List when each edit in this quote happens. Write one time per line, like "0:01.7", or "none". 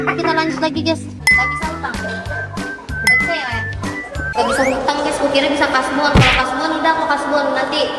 0:01.1